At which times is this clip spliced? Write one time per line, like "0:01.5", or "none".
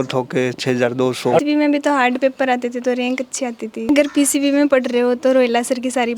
0:01.4
0:03.9